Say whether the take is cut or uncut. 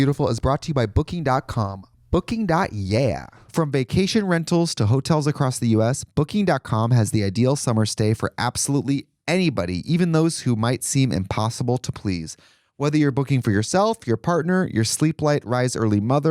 cut